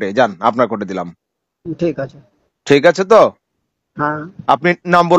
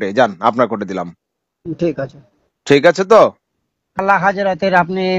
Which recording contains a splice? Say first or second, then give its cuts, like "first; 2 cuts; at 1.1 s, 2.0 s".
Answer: second; 1 cut; at 4.0 s